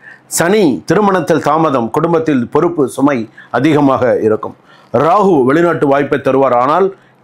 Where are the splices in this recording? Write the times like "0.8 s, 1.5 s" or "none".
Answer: none